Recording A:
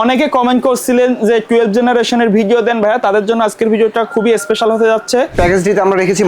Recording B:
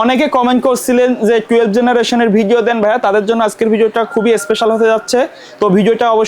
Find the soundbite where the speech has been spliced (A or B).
A